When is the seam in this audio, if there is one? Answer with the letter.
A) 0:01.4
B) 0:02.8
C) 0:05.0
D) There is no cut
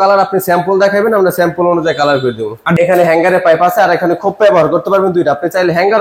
B